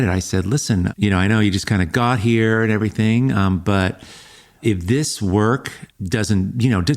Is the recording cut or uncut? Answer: cut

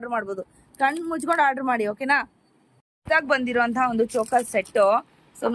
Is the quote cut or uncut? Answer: cut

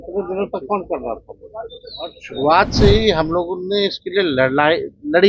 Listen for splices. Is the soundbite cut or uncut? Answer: cut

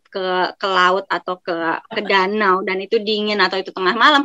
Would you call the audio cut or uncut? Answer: uncut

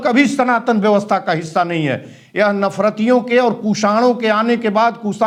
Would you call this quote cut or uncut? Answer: uncut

